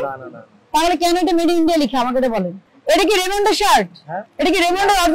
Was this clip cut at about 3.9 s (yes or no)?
no